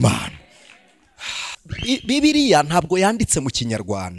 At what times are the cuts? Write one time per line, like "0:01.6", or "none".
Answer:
0:01.6